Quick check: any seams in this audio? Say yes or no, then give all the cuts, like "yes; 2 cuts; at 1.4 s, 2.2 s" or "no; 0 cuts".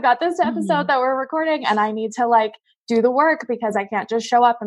no; 0 cuts